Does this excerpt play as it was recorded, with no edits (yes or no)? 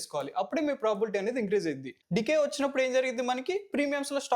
no